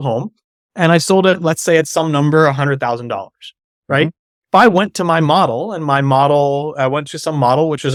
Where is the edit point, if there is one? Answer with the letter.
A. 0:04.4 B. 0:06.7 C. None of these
C